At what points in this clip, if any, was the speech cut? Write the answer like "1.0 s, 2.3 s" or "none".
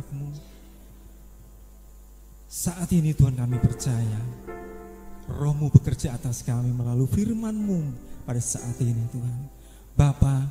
none